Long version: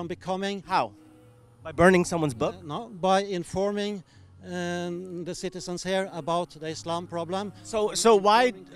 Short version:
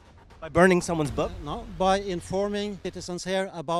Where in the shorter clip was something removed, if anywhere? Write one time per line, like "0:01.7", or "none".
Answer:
0:02.8

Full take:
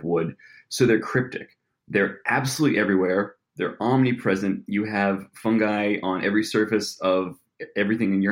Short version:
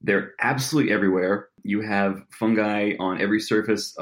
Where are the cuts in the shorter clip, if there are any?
0:01.6

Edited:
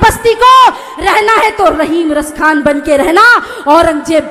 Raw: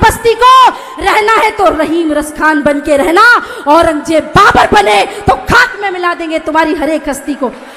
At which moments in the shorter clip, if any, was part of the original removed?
none

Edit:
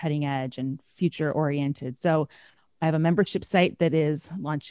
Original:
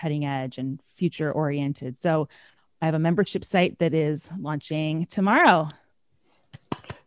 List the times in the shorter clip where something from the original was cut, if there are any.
none

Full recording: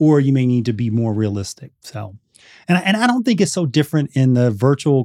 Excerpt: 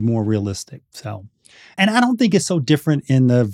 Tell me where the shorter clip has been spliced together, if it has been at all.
0:01.8

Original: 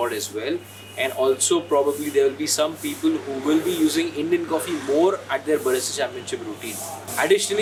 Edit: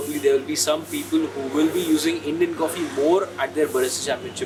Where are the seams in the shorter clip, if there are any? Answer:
none

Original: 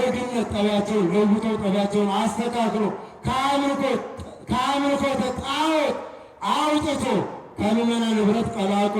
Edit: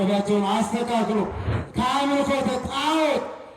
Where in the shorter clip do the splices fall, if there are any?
0:01.5

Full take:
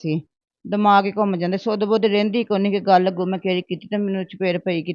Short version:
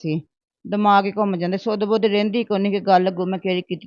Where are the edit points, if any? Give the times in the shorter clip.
none

